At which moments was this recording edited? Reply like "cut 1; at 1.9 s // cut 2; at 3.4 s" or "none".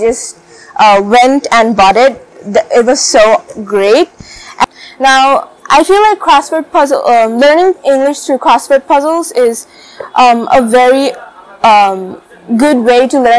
cut 1; at 4.6 s